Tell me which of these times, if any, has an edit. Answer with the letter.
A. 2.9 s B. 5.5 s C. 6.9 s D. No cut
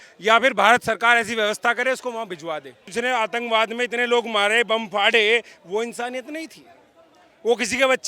A